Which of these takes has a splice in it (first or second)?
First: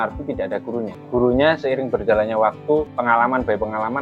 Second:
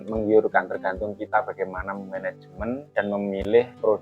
first